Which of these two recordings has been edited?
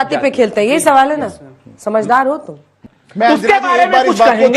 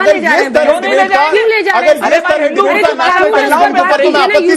first; 1 cut; at 2.8 s

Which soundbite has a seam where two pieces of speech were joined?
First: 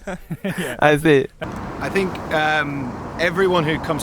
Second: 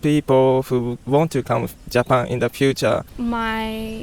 first; 1 cut; at 1.4 s

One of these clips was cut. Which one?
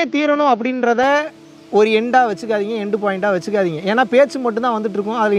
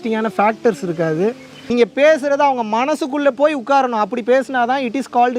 second; 1 cut; at 1.5 s

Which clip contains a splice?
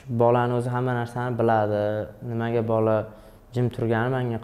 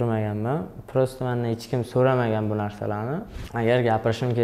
second; 1 cut; at 3.4 s

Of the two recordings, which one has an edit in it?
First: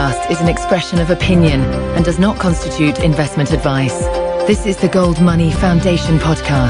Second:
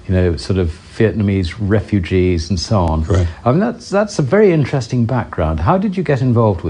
second; 1 cut; at 1.8 s

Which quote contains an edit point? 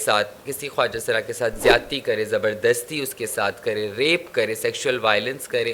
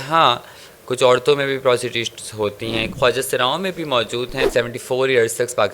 second; 2 cuts; at 2.9 s, 4.5 s

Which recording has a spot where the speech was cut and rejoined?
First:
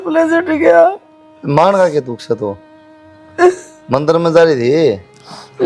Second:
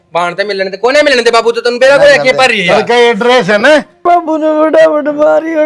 second; 1 cut; at 4.0 s

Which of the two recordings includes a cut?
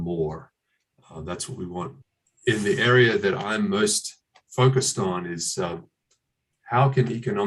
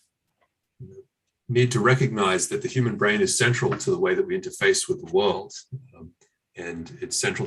first; 1 cut; at 2.0 s

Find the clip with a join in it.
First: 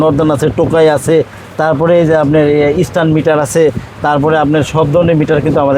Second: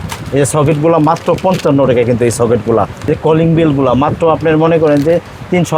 second; 1 cut; at 3.1 s

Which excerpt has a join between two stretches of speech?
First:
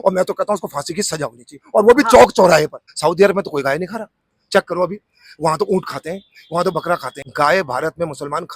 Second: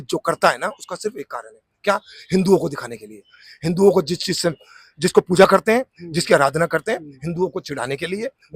first; 2 cuts; at 2.8 s, 7.2 s

